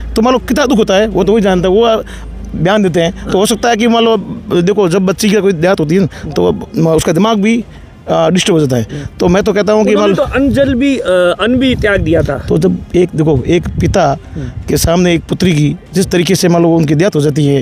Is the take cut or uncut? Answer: uncut